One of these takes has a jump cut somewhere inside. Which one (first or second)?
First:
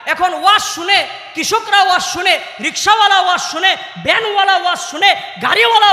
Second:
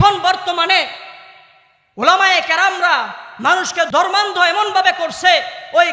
second